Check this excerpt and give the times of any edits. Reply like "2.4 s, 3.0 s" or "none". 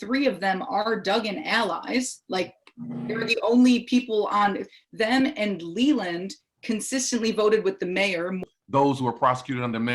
8.4 s